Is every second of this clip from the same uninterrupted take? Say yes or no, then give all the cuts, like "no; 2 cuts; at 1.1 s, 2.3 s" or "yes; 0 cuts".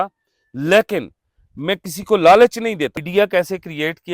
no; 1 cut; at 3.0 s